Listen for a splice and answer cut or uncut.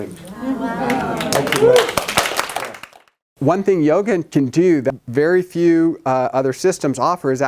cut